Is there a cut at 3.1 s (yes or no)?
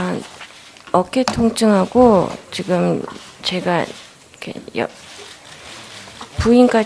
no